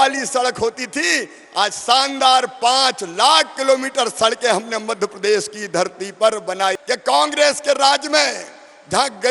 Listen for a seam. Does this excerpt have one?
yes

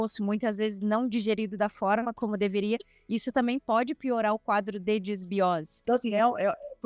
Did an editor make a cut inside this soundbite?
yes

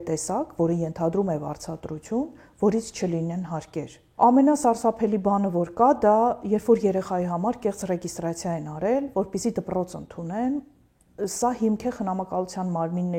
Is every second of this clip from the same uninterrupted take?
no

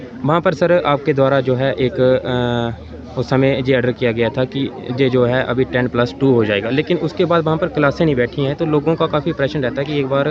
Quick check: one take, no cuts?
yes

